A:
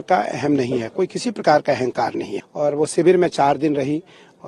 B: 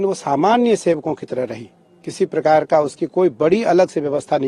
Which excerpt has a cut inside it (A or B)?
A